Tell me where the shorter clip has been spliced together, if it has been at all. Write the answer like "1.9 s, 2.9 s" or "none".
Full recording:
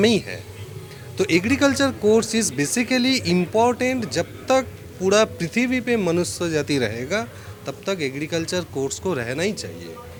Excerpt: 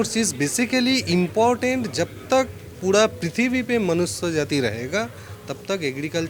none